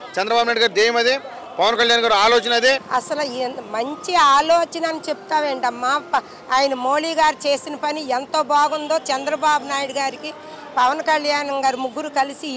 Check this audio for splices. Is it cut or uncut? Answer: cut